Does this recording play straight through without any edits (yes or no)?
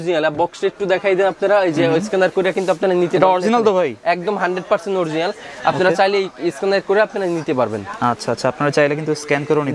yes